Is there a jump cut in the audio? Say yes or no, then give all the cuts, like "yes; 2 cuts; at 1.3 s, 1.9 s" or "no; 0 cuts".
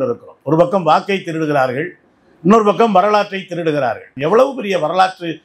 yes; 1 cut; at 4.1 s